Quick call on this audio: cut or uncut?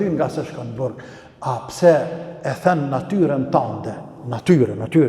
uncut